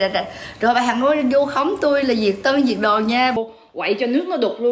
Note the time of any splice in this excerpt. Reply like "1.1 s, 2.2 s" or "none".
3.4 s